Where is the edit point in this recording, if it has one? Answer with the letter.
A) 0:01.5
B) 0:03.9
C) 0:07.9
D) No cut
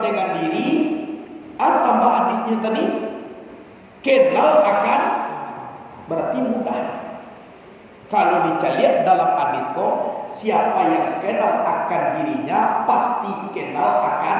D